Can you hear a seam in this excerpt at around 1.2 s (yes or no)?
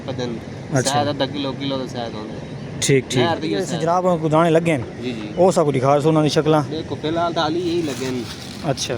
no